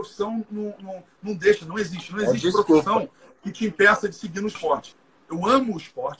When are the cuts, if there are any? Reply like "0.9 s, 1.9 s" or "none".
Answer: 5.0 s

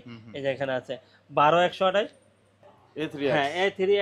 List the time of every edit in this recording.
2.5 s

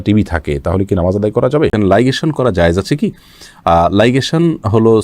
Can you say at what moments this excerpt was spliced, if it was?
1.7 s

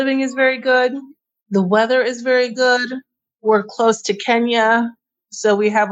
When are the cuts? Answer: 3.3 s

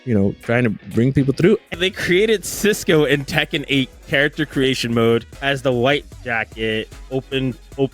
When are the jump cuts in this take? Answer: 1.7 s, 5.3 s

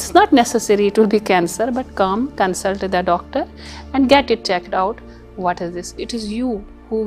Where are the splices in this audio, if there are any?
6.0 s

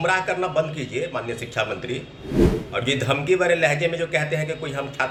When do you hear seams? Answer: none

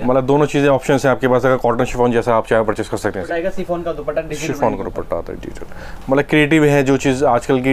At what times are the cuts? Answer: 3.3 s

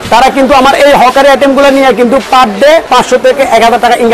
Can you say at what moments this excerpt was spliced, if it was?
2.9 s

